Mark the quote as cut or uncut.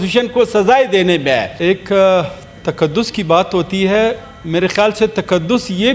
cut